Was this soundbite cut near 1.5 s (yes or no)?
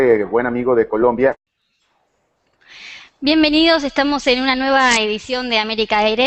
no